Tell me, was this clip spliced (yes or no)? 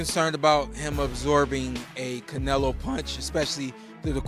no